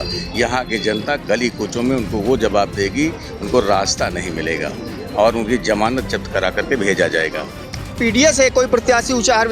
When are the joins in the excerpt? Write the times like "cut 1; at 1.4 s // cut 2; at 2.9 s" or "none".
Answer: cut 1; at 8.0 s